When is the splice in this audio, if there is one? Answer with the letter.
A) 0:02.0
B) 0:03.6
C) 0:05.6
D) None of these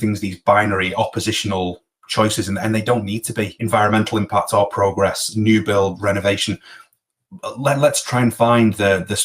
B